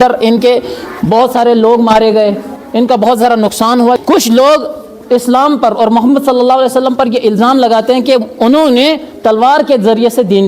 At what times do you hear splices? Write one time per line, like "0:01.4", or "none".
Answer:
0:04.0